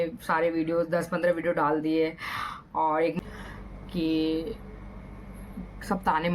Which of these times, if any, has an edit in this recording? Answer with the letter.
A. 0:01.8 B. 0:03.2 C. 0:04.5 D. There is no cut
B